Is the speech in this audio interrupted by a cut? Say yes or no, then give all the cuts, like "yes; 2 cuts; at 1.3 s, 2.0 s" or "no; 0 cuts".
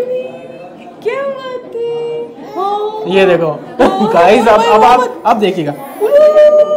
no; 0 cuts